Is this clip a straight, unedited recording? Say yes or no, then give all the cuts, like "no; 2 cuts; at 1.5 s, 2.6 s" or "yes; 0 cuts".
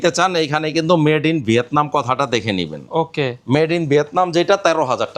yes; 0 cuts